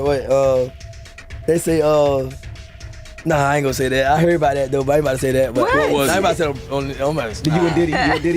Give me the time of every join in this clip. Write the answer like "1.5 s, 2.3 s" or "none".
7.3 s